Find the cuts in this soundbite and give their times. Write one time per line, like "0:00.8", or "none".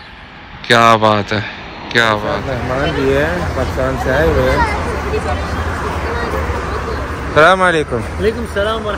0:02.4